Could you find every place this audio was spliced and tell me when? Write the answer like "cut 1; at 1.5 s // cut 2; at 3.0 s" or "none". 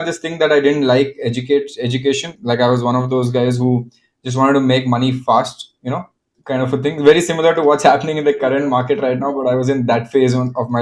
none